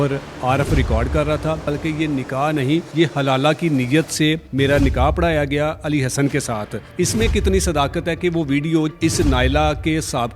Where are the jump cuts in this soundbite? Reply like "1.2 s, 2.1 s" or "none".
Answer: 1.6 s, 2.9 s, 4.5 s, 6.8 s, 8.9 s

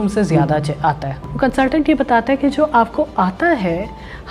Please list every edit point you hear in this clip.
1.2 s

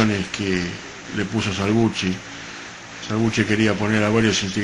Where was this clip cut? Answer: none

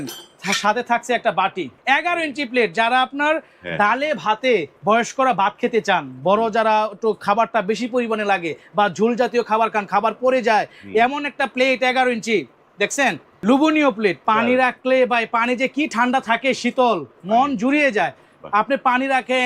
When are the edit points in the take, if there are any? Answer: 1.7 s, 4.7 s, 13.3 s, 14.2 s

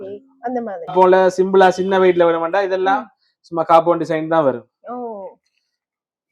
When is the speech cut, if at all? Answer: 0.9 s

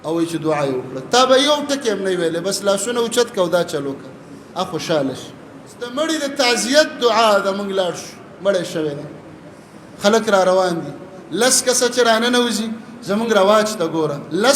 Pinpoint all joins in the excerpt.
5.9 s

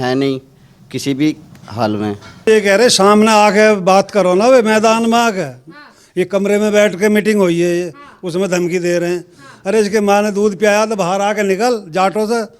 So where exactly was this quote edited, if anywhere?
2.5 s

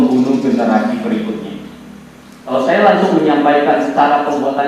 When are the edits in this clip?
2.4 s

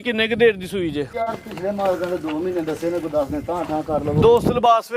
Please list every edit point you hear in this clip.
1.1 s

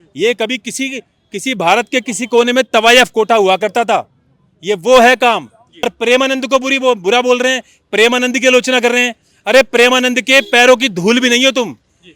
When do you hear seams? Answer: 5.9 s

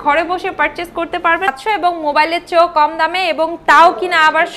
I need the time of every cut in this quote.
1.5 s

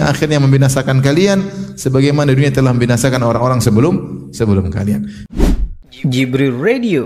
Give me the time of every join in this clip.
5.2 s

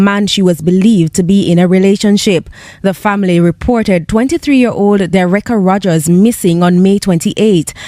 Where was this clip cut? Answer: none

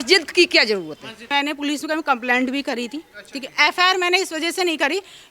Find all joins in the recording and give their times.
1.3 s

